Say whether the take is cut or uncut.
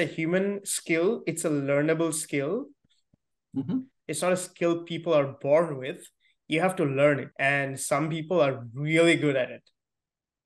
cut